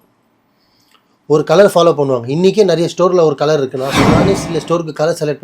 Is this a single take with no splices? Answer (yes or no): no